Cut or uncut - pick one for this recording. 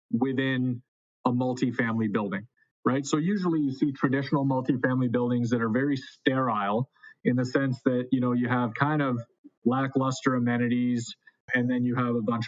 cut